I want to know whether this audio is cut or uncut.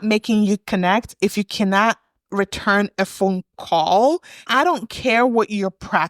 cut